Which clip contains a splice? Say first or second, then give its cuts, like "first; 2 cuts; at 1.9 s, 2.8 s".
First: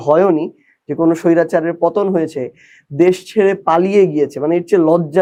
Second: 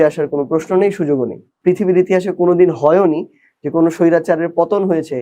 second; 1 cut; at 1.4 s